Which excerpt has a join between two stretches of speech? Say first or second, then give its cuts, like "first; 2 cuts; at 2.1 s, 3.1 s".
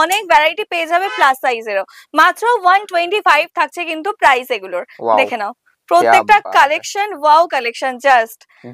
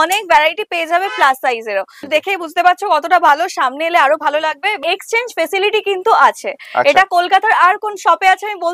second; 2 cuts; at 2.1 s, 4.8 s